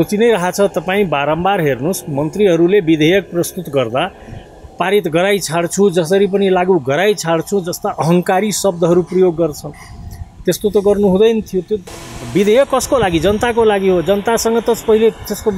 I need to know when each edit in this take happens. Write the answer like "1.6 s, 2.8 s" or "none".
none

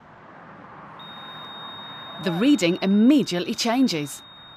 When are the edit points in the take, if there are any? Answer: 2.2 s

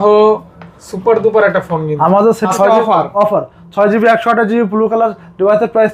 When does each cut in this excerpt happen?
2.5 s

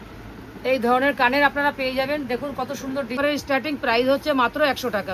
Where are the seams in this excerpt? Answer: 3.2 s

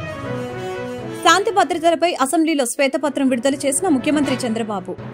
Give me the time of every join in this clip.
0.9 s

